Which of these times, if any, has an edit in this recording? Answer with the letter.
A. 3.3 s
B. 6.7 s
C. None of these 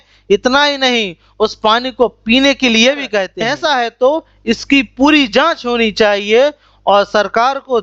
A